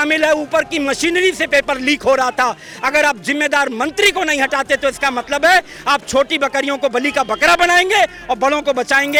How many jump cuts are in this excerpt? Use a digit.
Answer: 0